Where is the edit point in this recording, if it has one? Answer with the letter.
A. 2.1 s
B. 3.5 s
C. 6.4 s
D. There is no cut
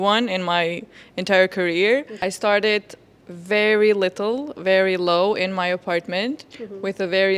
A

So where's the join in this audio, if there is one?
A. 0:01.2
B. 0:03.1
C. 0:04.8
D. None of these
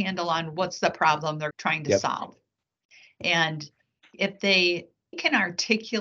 D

